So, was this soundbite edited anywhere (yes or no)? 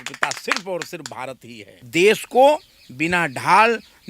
yes